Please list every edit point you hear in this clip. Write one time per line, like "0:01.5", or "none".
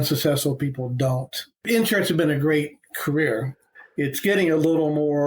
0:01.5